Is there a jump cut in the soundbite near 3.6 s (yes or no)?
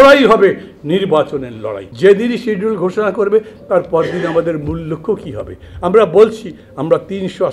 no